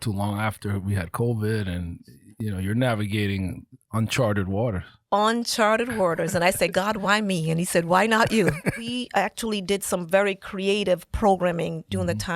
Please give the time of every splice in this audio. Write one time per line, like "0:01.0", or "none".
0:08.9